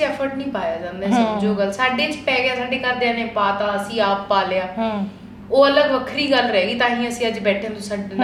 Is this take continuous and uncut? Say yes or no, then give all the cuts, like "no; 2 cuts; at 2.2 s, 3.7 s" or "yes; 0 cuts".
yes; 0 cuts